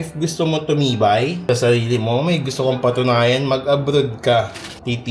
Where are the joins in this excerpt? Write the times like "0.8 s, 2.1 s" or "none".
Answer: none